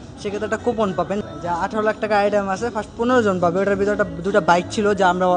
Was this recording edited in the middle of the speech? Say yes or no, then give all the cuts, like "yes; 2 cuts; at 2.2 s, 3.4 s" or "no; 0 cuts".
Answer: no; 0 cuts